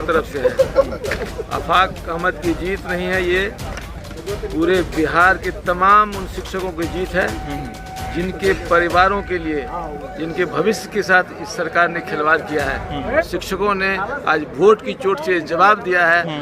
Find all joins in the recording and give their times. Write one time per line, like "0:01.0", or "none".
0:13.3